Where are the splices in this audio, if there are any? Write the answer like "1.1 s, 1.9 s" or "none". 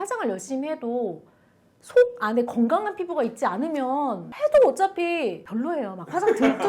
4.3 s, 5.4 s